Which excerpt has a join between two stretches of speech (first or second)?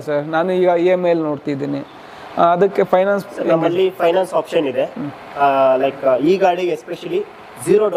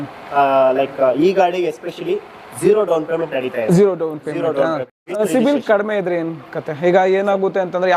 second